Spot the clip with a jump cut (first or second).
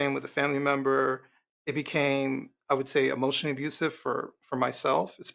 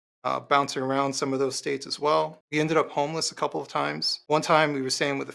second